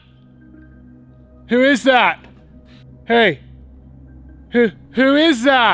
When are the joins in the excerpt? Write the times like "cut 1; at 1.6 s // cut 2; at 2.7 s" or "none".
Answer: none